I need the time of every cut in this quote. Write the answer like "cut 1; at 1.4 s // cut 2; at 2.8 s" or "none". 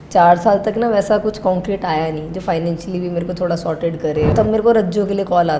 cut 1; at 4.3 s